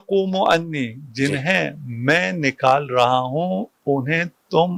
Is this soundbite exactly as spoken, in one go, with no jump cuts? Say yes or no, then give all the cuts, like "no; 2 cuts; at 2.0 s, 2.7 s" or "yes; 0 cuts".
yes; 0 cuts